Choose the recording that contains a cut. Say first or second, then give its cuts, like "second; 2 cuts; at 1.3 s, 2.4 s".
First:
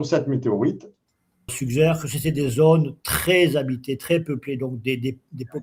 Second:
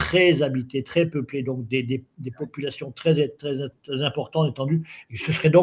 first; 1 cut; at 1.5 s